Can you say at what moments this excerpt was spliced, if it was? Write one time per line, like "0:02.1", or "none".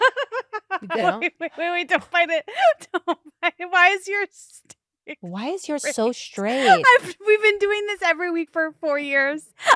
0:01.0